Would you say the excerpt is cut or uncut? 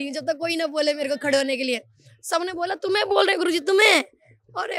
uncut